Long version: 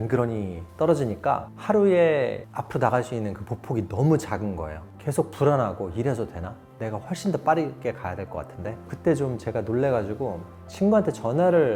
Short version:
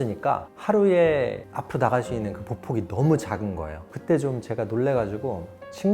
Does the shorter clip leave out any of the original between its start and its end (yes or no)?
yes